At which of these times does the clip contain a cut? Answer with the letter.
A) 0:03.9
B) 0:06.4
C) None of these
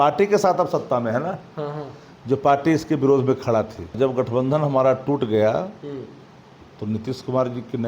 A